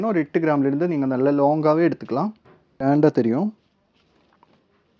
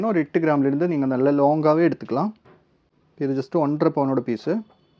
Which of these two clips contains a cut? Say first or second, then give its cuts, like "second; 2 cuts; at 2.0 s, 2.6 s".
first; 1 cut; at 2.8 s